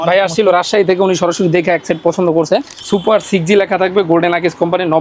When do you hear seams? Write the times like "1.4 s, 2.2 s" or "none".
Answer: 2.8 s